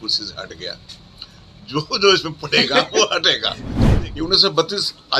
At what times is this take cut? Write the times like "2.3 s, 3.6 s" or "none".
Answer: 3.8 s

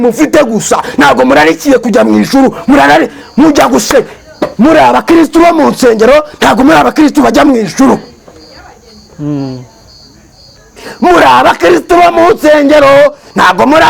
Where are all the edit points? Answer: none

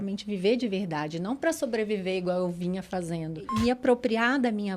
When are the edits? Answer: 3.4 s

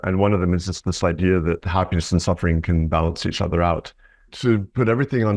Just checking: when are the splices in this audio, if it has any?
1.6 s, 4.3 s

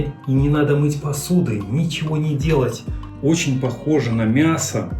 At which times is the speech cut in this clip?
3.1 s

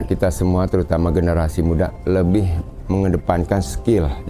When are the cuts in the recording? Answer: none

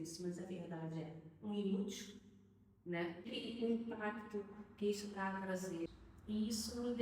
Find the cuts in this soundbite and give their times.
3.3 s, 5.9 s

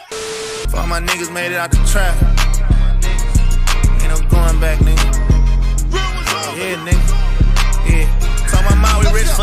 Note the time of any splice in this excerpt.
4.9 s

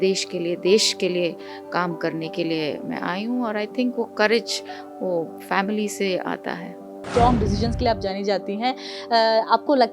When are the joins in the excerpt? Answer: 7.0 s

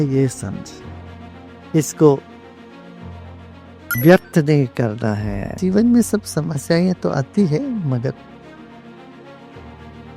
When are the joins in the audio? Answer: 5.6 s

